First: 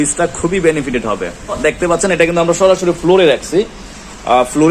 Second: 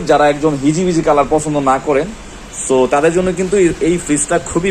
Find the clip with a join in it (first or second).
first